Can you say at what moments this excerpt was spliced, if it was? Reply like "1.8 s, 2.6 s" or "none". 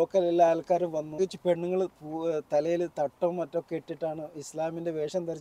1.2 s